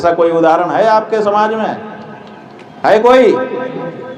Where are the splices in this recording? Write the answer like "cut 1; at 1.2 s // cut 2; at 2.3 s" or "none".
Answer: none